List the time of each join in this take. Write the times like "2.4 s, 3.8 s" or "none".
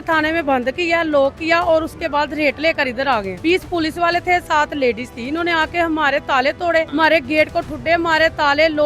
3.3 s, 6.9 s